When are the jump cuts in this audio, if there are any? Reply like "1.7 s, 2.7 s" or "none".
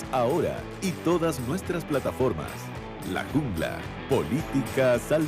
3.9 s